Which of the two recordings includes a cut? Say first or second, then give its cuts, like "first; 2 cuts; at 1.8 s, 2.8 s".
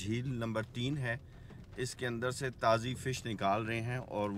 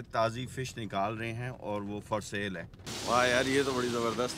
second; 1 cut; at 2.9 s